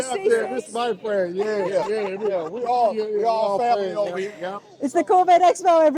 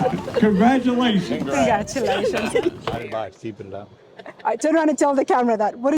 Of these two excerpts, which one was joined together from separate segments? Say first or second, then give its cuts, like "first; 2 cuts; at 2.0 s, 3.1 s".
second; 1 cut; at 3.0 s